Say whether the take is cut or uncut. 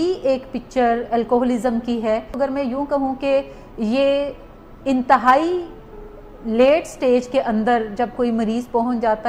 cut